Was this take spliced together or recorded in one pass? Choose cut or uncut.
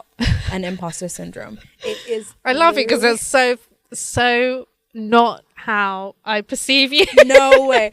uncut